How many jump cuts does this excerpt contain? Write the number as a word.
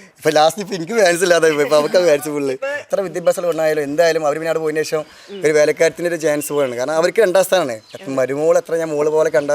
one